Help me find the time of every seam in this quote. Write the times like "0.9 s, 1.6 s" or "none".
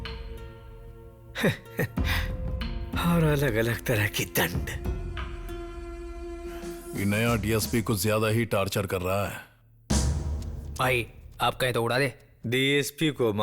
6.8 s